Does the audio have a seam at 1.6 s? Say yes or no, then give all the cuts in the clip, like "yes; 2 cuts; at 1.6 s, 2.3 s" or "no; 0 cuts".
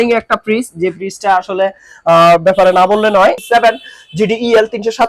no; 1 cut; at 3.4 s